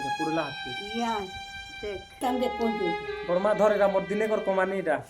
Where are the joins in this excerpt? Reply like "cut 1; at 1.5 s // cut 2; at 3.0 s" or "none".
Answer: cut 1; at 2.2 s